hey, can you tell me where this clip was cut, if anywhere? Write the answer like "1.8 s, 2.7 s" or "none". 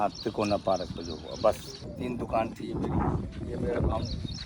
1.8 s